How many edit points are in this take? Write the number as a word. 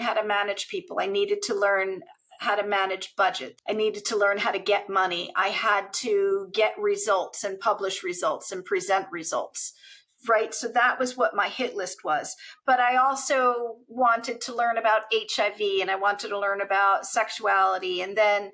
one